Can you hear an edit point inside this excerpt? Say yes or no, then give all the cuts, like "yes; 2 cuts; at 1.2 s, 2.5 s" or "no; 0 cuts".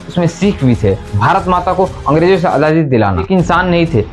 yes; 2 cuts; at 1.1 s, 3.2 s